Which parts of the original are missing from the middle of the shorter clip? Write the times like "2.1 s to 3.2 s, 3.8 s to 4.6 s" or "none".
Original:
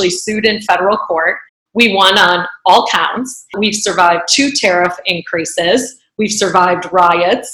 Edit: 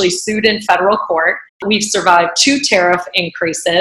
1.5 s to 3.4 s